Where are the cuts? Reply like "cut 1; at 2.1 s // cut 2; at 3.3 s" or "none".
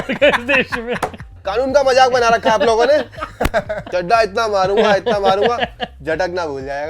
cut 1; at 1.4 s // cut 2; at 3.8 s